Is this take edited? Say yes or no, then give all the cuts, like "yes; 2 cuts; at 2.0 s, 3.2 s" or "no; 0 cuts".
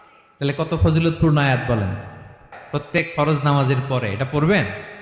yes; 1 cut; at 3.0 s